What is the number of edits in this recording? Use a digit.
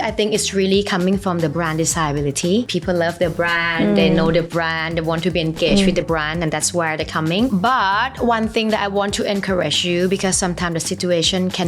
2